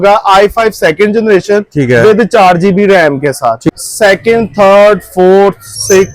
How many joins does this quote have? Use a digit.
1